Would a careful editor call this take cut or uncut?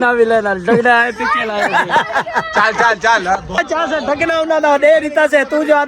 cut